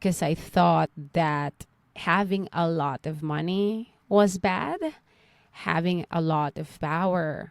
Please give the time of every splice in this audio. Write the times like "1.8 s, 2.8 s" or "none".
2.0 s